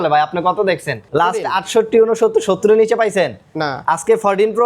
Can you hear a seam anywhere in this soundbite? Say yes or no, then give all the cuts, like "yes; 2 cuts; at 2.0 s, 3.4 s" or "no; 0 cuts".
yes; 1 cut; at 0.9 s